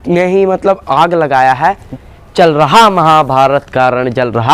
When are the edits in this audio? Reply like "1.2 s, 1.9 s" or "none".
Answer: 1.8 s